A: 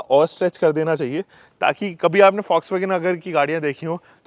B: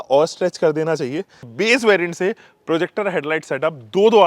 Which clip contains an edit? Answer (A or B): B